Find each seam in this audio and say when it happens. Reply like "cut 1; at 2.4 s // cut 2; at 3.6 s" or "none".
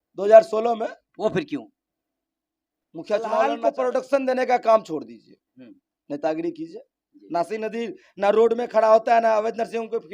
cut 1; at 3.6 s